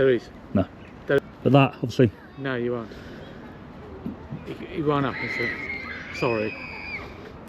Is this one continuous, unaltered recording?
no; 1 cut; at 1.2 s

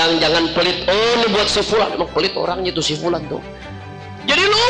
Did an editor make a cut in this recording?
no; 0 cuts

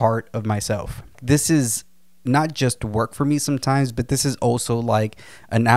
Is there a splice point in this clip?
yes; 1 cut; at 1.2 s

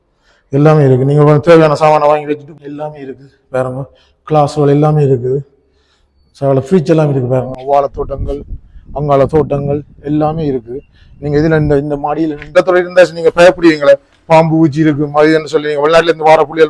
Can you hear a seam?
yes; 3 cuts; at 2.5 s, 7.6 s, 12.4 s

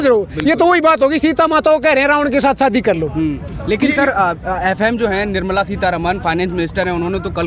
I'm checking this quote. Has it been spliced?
no; 0 cuts

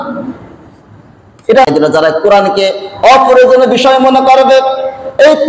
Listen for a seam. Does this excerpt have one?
yes; 1 cut; at 1.7 s

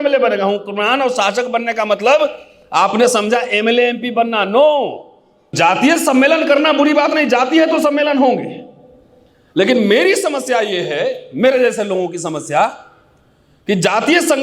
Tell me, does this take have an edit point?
yes; 1 cut; at 5.5 s

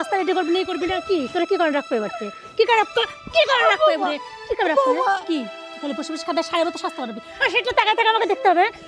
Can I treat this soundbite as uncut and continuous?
yes; 0 cuts

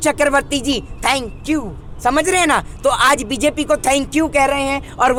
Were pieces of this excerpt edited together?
no; 0 cuts

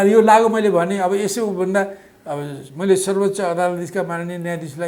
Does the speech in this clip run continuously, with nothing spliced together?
yes; 0 cuts

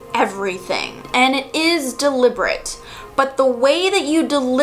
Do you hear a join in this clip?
no; 0 cuts

